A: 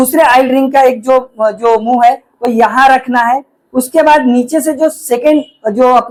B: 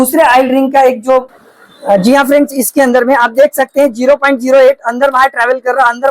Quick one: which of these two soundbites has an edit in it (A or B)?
B